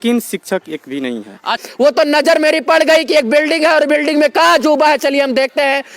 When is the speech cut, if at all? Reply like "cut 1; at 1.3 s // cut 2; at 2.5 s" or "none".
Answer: cut 1; at 1.6 s